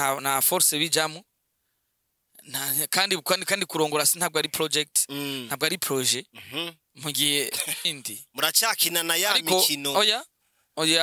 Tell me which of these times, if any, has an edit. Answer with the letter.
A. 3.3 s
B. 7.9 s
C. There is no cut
B